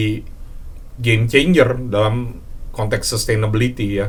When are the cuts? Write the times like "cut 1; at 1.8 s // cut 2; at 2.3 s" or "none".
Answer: none